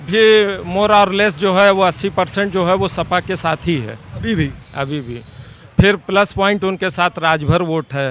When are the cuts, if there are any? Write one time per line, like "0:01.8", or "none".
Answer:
none